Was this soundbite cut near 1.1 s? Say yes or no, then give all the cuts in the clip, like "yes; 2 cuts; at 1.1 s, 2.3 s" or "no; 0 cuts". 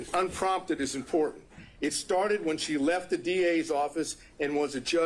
no; 0 cuts